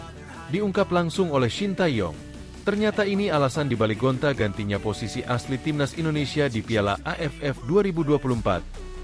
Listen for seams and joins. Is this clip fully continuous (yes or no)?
yes